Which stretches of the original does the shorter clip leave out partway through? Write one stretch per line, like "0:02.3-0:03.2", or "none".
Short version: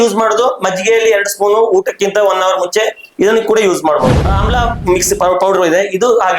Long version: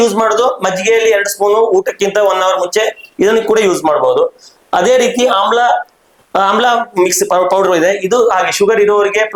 0:04.1-0:06.2

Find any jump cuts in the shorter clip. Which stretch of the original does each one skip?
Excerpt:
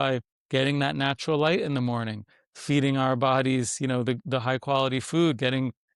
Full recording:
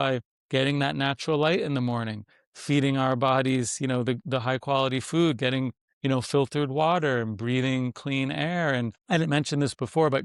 none

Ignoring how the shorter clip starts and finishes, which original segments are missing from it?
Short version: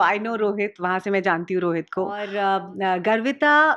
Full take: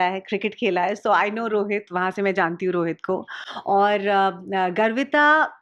0:03.4-0:04.0

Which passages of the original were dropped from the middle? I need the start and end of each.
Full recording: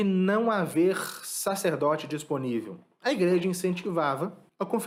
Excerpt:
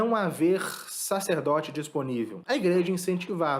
0:02.7-0:02.9

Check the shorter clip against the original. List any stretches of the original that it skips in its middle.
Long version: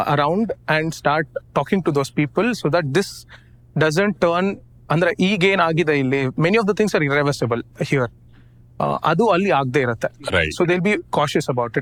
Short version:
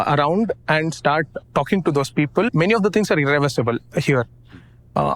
0:02.5-0:06.3

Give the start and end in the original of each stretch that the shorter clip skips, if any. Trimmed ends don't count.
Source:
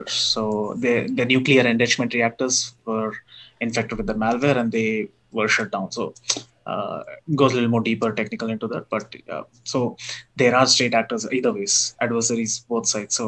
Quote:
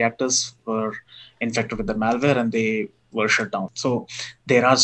0:05.9-0:09.6

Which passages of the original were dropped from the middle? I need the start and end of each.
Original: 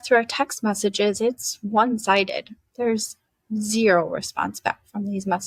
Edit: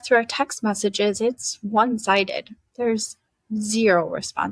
none

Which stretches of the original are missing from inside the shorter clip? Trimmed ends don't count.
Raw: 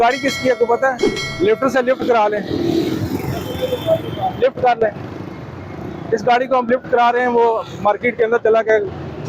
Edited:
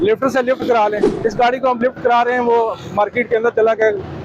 0:02.5-0:05.9

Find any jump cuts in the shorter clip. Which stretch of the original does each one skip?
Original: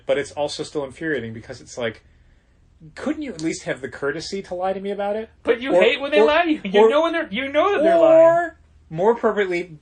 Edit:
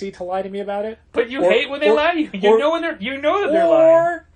none

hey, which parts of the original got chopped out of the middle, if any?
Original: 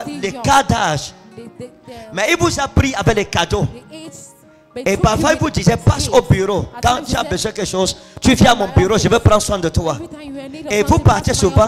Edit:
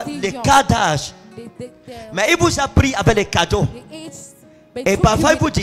none

